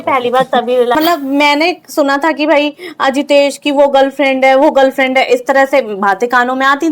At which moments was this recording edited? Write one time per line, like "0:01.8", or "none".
0:01.0